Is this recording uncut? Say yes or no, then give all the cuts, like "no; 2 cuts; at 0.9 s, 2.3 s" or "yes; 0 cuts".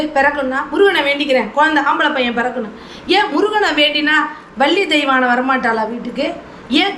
yes; 0 cuts